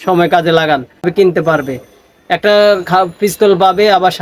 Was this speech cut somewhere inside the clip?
yes; 1 cut; at 1.1 s

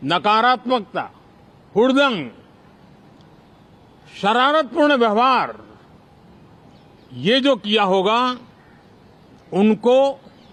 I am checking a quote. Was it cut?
no; 0 cuts

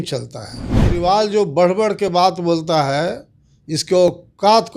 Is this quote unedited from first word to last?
no; 1 cut; at 0.9 s

